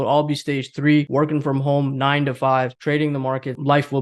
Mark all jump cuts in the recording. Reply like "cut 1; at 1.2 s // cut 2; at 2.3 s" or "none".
cut 1; at 1.1 s // cut 2; at 3.1 s